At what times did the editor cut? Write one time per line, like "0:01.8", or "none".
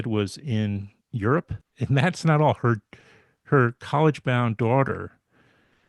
0:01.6

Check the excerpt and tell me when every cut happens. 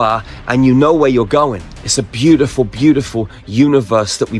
0:01.7

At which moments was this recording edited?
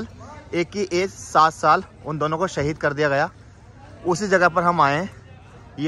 none

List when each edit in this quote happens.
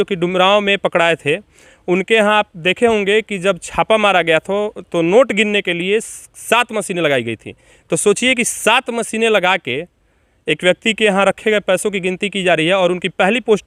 none

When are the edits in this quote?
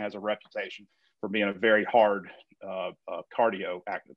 0:00.9

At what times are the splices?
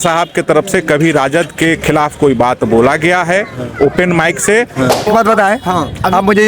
0:05.1

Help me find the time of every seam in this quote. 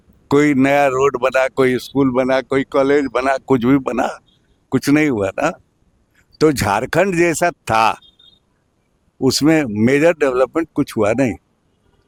none

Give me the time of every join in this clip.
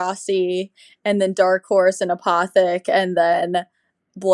none

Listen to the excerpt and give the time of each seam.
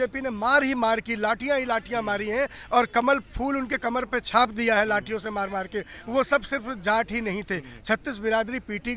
none

